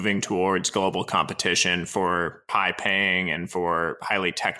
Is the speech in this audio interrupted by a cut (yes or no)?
yes